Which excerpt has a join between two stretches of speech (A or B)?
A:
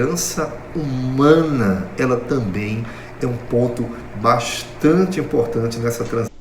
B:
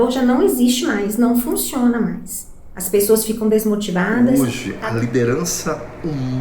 B